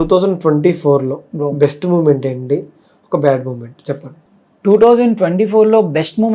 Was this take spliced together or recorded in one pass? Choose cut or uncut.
uncut